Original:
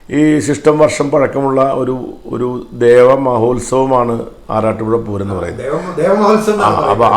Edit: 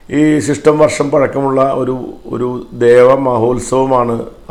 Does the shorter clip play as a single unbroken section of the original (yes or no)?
yes